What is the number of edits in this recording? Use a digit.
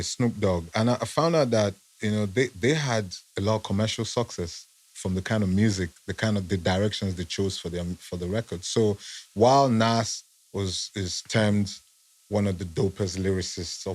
0